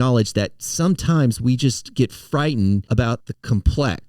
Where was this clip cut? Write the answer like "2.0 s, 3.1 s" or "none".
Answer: 3.1 s